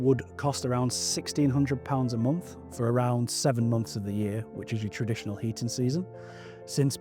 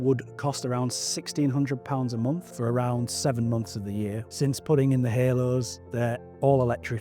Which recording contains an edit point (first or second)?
second